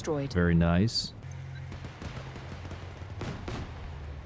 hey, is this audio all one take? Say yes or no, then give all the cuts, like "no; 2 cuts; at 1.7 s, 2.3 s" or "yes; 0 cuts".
no; 1 cut; at 1.1 s